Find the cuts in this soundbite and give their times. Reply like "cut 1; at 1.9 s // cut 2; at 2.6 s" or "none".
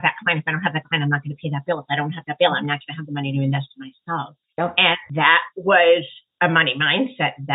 cut 1; at 4.4 s // cut 2; at 5.4 s // cut 3; at 6.2 s